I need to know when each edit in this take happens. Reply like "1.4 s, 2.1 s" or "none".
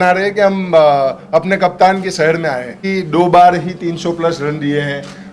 none

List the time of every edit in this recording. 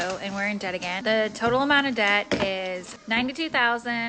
1.0 s, 2.9 s

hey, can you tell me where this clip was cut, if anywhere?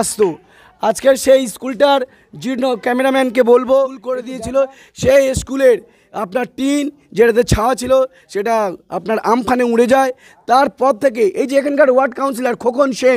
4.3 s

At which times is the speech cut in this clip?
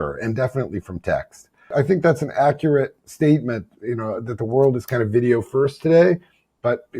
1.7 s

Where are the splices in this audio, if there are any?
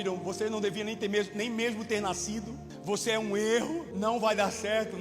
2.7 s, 3.9 s

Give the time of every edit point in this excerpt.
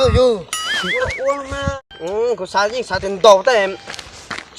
1.8 s

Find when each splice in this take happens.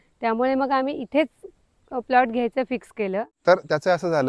3.3 s

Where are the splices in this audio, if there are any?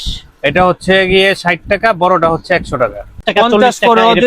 3.3 s

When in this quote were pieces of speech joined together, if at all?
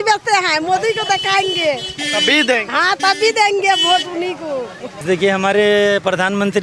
5.0 s

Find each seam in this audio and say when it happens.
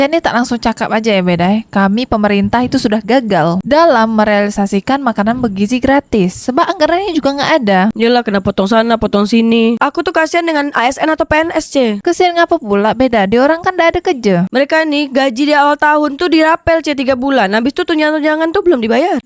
none

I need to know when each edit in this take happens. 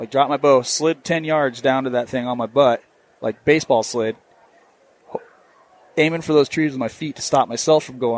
none

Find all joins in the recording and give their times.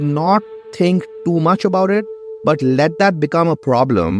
none

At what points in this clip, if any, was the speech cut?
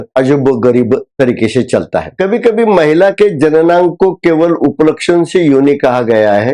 2.0 s

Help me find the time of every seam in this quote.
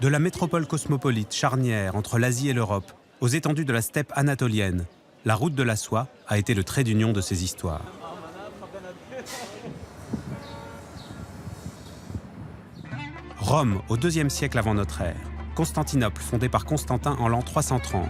9.9 s

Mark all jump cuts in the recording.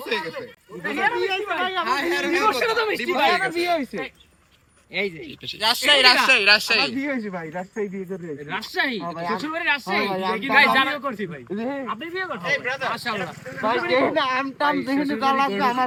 none

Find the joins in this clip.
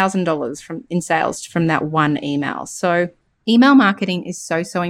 3.3 s

